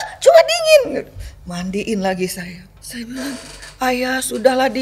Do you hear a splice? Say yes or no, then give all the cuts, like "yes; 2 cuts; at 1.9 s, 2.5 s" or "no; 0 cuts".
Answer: yes; 1 cut; at 2.7 s